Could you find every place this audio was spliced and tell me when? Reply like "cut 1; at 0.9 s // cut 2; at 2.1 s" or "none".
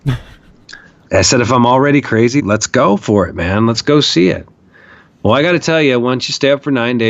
cut 1; at 1.0 s // cut 2; at 2.4 s

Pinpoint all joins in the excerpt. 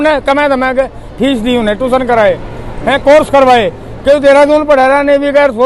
none

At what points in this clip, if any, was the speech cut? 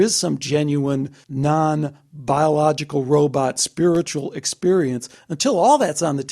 cut 1; at 1.2 s

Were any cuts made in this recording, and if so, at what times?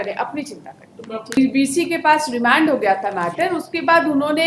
cut 1; at 1.4 s

